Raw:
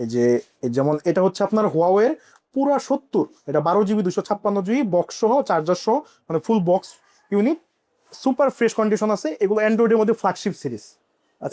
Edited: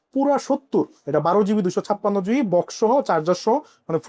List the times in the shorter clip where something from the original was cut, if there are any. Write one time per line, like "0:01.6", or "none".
none